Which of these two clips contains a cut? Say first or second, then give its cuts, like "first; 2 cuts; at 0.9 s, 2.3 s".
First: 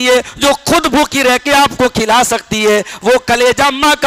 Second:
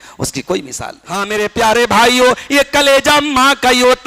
second; 1 cut; at 1.2 s